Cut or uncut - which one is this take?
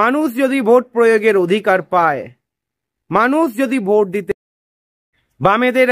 cut